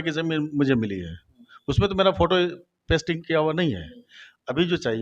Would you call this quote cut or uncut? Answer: uncut